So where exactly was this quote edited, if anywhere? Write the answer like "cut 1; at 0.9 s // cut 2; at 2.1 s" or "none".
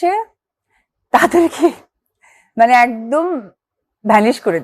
none